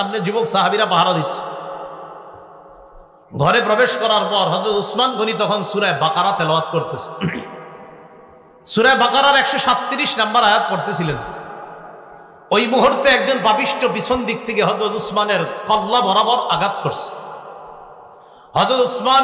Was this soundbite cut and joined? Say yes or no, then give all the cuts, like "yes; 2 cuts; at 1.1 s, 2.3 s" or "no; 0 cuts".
yes; 1 cut; at 4.4 s